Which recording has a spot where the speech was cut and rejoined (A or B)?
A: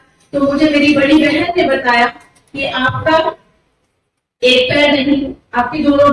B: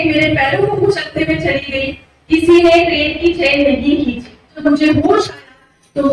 B